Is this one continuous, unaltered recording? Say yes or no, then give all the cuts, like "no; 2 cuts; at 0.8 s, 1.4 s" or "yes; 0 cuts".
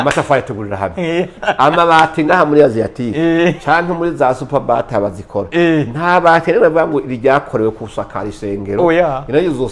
yes; 0 cuts